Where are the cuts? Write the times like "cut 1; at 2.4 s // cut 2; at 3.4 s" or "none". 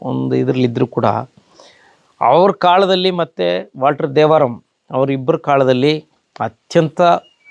none

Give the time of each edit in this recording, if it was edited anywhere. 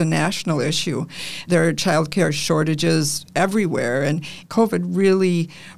cut 1; at 1.4 s // cut 2; at 4.4 s

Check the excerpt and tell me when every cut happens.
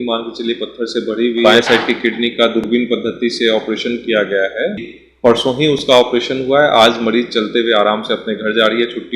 cut 1; at 1.4 s // cut 2; at 4.9 s

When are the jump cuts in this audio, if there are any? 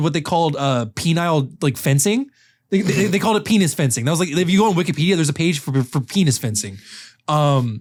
none

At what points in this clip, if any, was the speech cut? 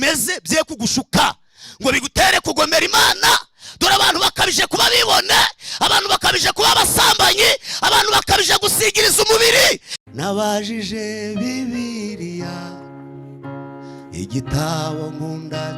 cut 1; at 9.9 s

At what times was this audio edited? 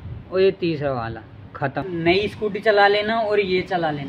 cut 1; at 1.8 s

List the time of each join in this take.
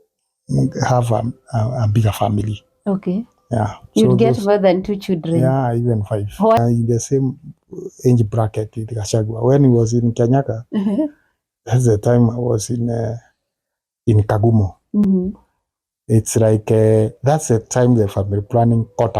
cut 1; at 6.6 s

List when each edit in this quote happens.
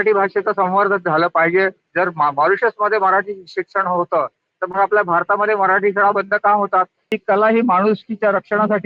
cut 1; at 1.8 s // cut 2; at 7.0 s

